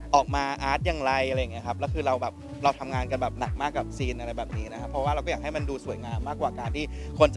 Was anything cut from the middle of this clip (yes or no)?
no